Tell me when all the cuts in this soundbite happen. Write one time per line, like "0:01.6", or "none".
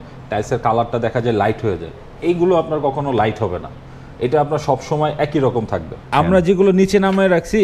0:06.1